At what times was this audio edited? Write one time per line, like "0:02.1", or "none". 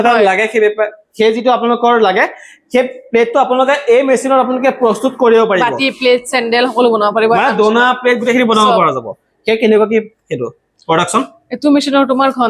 none